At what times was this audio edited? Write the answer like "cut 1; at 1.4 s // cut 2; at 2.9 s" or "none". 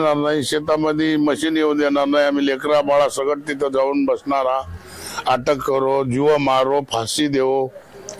none